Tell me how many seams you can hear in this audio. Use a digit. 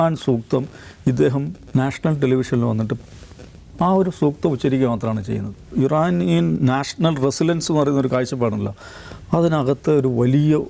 1